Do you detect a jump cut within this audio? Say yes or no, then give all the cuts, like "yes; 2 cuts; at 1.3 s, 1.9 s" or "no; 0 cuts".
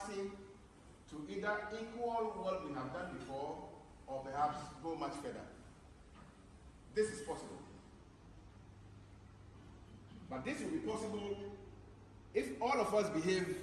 no; 0 cuts